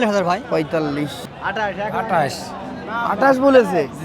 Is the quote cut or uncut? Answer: cut